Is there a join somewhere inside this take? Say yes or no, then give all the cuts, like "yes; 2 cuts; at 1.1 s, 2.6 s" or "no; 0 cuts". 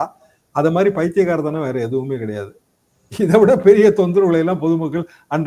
no; 0 cuts